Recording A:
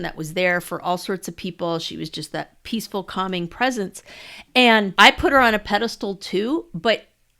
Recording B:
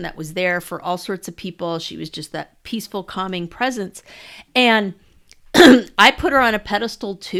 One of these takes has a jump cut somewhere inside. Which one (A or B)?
A